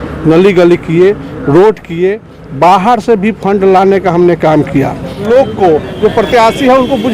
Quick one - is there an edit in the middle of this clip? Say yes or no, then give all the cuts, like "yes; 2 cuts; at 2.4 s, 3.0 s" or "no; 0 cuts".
yes; 1 cut; at 5.2 s